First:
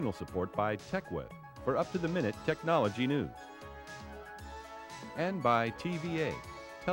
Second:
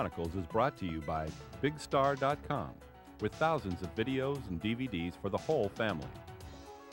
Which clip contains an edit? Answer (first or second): second